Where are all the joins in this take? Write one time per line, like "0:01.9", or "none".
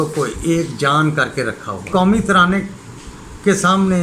0:01.9